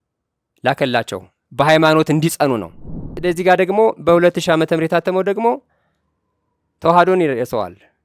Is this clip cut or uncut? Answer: cut